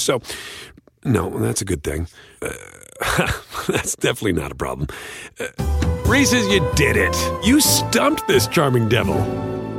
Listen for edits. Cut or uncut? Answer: uncut